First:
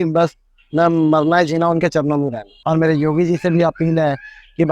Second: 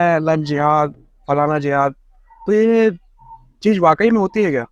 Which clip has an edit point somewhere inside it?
first; 1 cut; at 2.5 s

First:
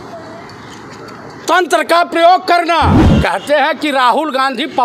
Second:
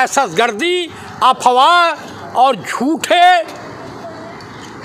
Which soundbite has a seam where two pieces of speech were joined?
first; 1 cut; at 3.0 s

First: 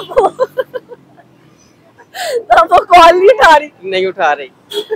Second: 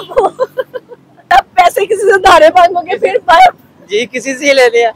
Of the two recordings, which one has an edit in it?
second; 1 cut; at 1.3 s

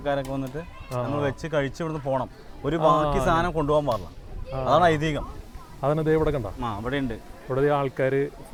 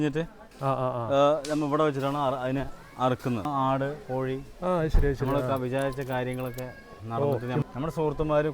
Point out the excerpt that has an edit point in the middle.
second; 2 cuts; at 3.5 s, 7.6 s

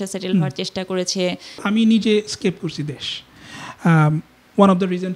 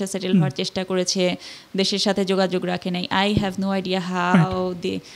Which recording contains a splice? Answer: first; 1 cut; at 1.6 s

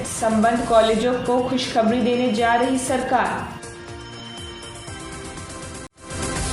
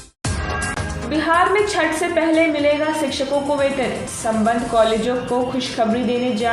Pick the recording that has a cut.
second; 1 cut; at 0.9 s

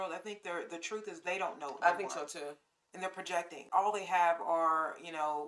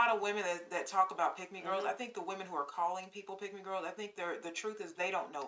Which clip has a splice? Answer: first; 1 cut; at 3.6 s

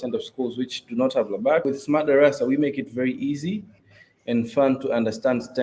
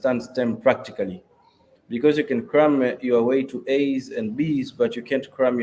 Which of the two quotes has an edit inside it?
first; 1 cut; at 1.6 s

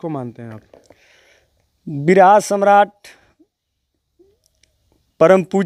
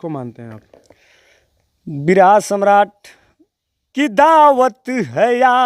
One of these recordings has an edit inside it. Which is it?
second; 1 cut; at 3.8 s

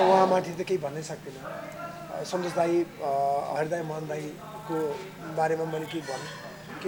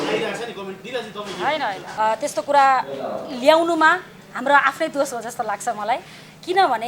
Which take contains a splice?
second; 1 cut; at 1.8 s

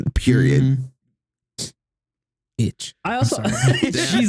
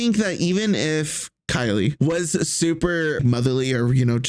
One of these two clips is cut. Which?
second; 2 cuts; at 2.0 s, 3.2 s

